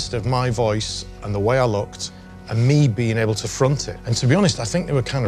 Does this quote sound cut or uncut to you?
uncut